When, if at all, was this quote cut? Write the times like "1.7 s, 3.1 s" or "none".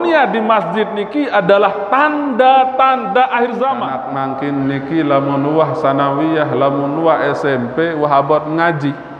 4.0 s